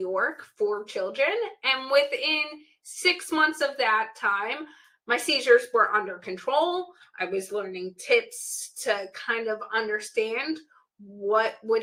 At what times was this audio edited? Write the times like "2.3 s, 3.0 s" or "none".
none